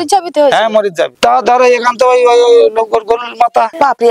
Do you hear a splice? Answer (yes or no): yes